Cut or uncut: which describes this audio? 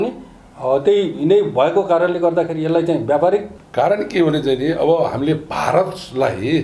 cut